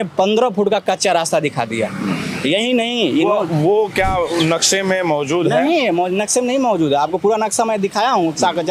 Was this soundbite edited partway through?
no; 0 cuts

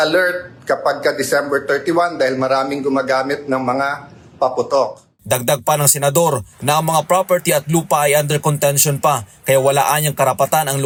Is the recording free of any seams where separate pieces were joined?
yes; 0 cuts

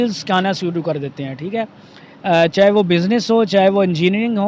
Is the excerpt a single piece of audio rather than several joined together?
yes; 0 cuts

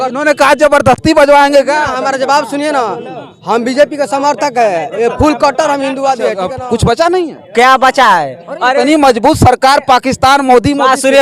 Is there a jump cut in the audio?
yes; 1 cut; at 6.5 s

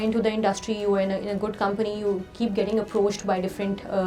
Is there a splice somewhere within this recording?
no; 0 cuts

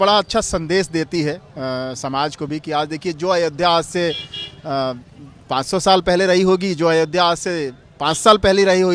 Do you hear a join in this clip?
no; 0 cuts

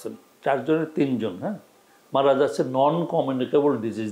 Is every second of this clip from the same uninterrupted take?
yes; 0 cuts

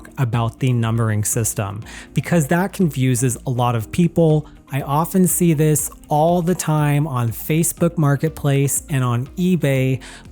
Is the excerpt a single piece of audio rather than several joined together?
no; 1 cut; at 4.6 s

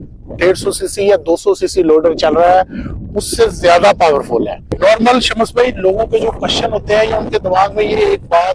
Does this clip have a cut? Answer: no; 0 cuts

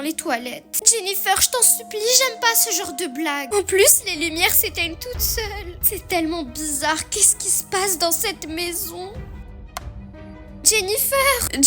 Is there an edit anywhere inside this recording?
yes; 1 cut; at 3.4 s

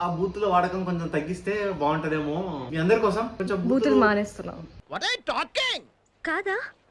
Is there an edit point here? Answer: yes; 2 cuts; at 2.6 s, 3.4 s

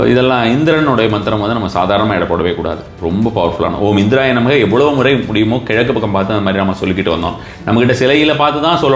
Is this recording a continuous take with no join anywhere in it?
yes; 0 cuts

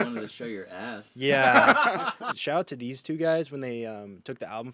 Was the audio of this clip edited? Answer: yes; 1 cut; at 2.3 s

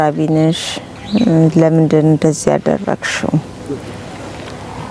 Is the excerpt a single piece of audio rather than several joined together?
yes; 0 cuts

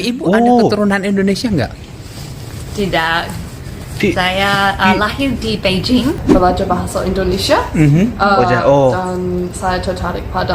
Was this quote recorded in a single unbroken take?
no; 1 cut; at 6.2 s

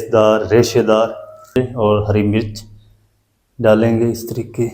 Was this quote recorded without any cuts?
no; 1 cut; at 1.6 s

